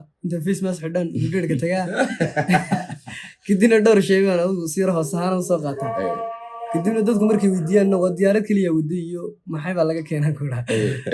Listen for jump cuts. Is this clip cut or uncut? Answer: uncut